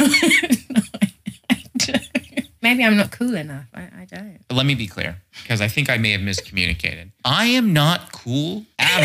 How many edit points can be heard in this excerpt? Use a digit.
1